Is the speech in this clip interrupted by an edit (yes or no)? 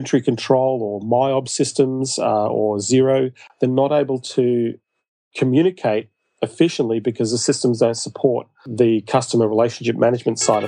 yes